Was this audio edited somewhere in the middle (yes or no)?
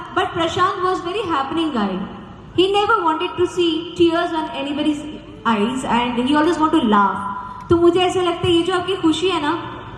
no